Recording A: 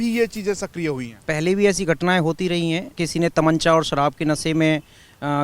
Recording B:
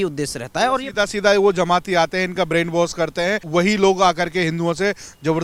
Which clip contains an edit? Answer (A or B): A